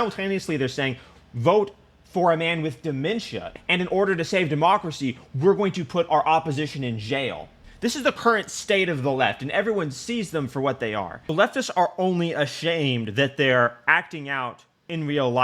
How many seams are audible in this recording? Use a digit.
1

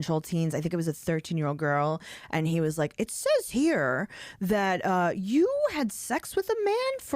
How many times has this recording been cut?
0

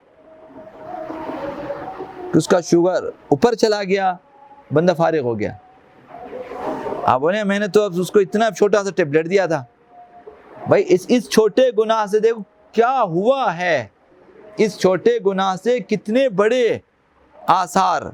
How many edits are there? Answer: 0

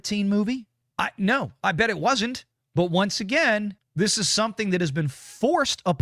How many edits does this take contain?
1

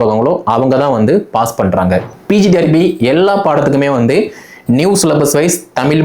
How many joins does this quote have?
1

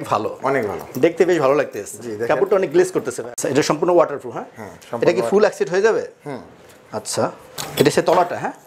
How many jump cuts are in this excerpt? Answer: 2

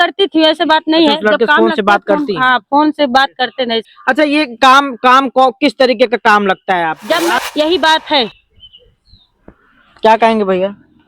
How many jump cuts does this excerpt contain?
2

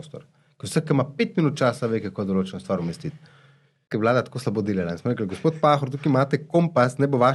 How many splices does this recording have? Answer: 1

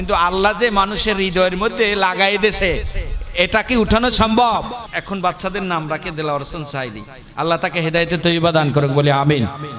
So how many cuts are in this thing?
1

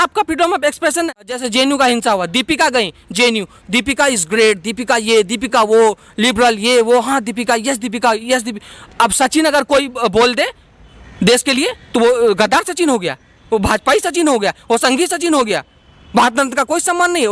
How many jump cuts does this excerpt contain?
1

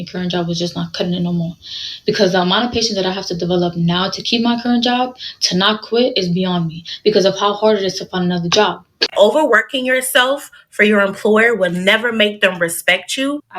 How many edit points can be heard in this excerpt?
1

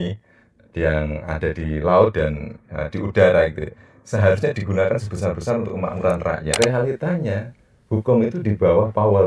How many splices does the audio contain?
1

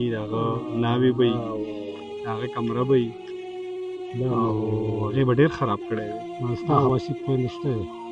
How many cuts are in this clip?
1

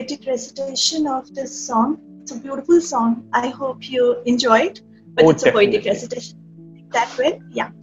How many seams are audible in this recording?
0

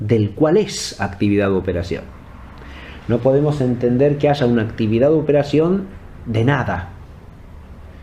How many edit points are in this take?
1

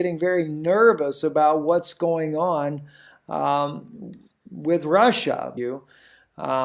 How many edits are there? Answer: 0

